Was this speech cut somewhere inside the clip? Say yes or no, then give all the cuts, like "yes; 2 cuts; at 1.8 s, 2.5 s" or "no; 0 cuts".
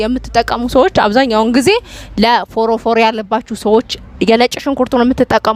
no; 0 cuts